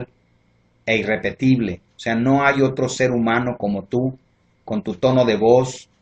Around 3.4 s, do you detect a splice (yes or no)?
no